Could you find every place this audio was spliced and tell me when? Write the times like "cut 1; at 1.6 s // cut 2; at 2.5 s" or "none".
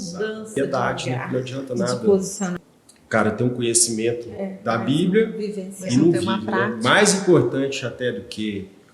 cut 1; at 2.6 s